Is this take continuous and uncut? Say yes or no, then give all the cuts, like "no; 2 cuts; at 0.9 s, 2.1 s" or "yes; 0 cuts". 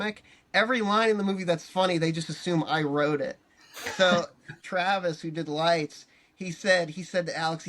no; 1 cut; at 4.6 s